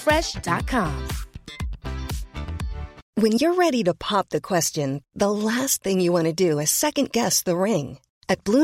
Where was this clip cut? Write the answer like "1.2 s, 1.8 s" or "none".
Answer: 3.0 s